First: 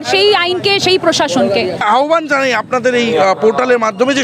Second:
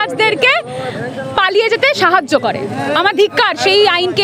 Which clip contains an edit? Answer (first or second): first